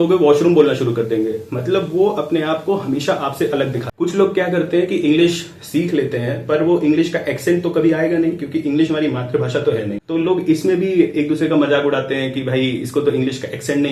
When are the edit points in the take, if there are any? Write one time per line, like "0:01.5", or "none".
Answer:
none